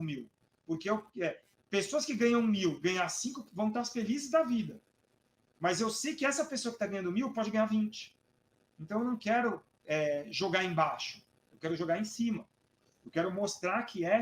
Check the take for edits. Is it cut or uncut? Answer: uncut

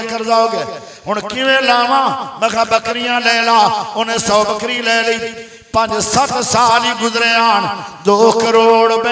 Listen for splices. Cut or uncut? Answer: uncut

